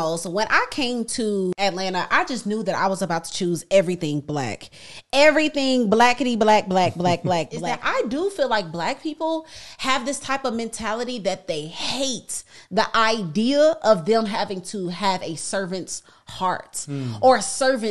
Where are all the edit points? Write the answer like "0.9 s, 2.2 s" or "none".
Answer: 1.5 s, 7.7 s